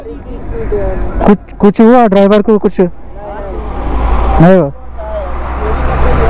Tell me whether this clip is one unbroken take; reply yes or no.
yes